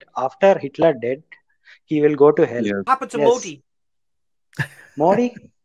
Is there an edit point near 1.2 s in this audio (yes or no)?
no